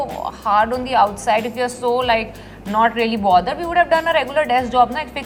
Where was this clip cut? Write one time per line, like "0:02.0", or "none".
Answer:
none